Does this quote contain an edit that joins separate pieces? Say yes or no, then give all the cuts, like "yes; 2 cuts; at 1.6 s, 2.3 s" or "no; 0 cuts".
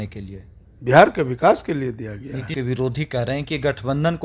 yes; 1 cut; at 2.5 s